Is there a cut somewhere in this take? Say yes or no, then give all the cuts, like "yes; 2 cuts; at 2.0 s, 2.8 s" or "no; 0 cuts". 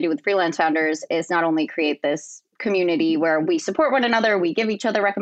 no; 0 cuts